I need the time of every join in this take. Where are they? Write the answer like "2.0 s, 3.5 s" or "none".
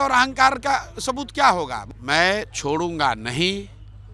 1.9 s